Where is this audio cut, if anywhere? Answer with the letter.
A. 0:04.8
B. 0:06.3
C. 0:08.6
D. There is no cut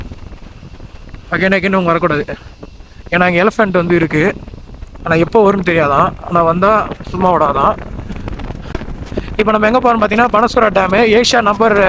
C